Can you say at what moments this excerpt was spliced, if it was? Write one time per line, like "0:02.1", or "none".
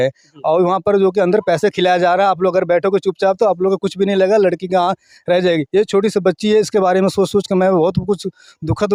none